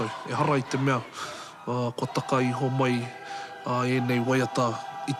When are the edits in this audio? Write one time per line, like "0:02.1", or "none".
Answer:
none

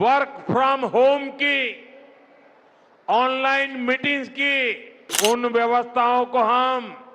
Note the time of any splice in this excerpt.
0:05.1

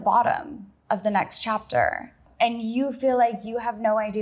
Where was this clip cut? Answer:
0:02.2

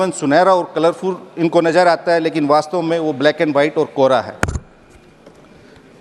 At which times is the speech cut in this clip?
none

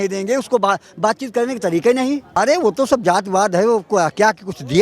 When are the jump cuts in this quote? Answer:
0:02.4

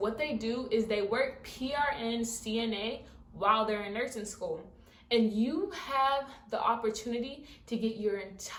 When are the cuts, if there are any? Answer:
none

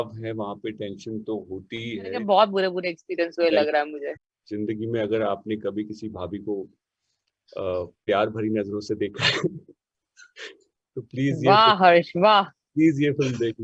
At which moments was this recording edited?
0:02.2
0:04.0

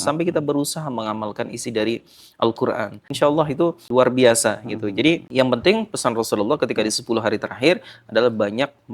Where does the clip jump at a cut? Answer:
0:03.0
0:03.8
0:05.3

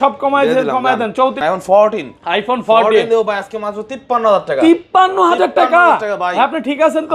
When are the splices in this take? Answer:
0:01.4

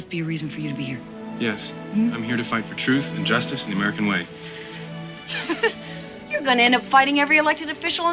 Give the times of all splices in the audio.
0:05.3

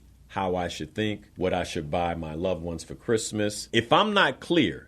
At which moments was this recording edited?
0:01.3
0:03.6

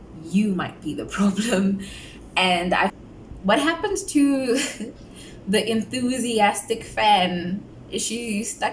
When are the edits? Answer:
0:02.9

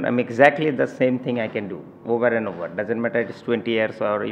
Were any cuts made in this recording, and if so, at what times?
none

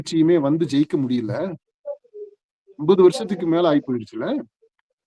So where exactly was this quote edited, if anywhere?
none

